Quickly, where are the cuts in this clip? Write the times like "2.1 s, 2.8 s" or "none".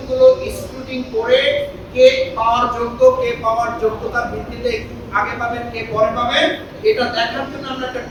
none